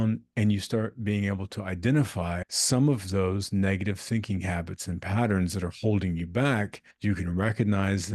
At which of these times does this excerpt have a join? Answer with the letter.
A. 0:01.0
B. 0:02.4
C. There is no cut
B